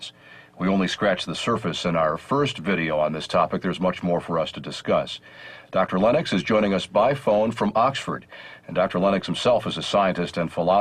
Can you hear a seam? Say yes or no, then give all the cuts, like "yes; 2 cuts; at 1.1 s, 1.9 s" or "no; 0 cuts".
no; 0 cuts